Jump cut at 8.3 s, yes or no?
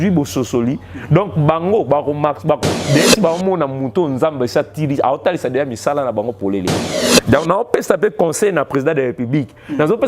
no